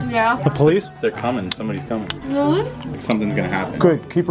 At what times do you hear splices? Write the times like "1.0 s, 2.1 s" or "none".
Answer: 2.8 s